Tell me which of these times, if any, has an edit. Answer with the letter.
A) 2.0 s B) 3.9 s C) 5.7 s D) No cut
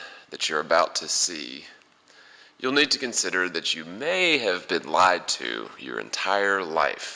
D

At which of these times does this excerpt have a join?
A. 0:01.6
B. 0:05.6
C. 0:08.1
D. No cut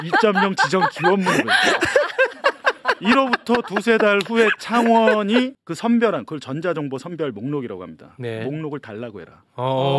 B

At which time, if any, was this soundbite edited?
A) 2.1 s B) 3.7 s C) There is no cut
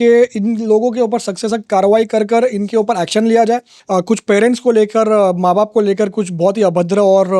B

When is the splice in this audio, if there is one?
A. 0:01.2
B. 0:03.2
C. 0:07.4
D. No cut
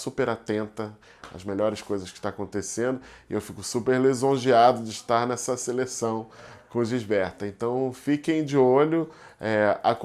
D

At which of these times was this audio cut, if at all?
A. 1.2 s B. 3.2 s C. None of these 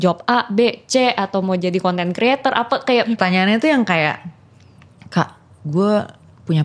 B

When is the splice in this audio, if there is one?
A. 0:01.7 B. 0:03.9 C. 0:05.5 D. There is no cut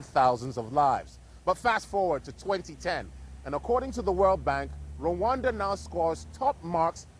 C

